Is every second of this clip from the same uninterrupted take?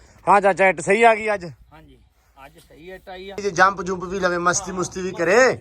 no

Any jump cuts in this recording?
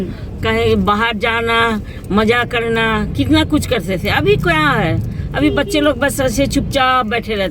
no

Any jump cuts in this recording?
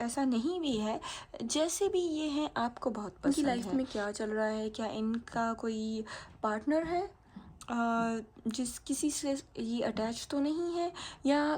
yes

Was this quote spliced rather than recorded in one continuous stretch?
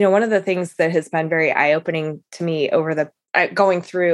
yes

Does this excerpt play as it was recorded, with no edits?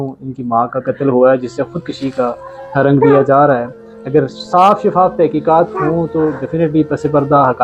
yes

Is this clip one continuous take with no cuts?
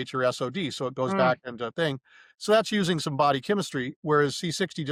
yes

